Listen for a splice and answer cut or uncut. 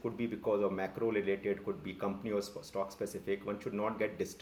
uncut